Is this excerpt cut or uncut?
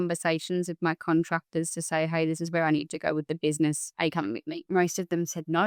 cut